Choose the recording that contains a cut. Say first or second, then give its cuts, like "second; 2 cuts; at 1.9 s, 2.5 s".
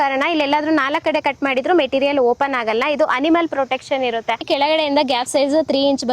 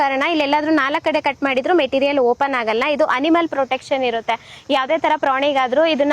first; 1 cut; at 4.4 s